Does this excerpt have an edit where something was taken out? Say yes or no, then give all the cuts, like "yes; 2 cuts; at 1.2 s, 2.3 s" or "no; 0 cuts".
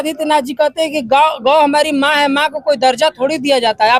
no; 0 cuts